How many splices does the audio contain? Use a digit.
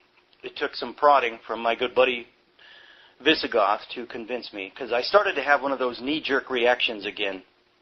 1